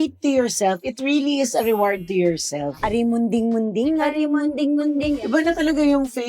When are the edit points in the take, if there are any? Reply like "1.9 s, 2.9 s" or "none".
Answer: 2.8 s, 5.2 s